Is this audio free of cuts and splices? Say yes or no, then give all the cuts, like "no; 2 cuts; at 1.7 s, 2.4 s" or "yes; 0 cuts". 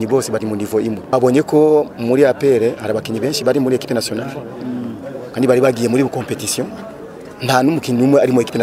no; 1 cut; at 1.1 s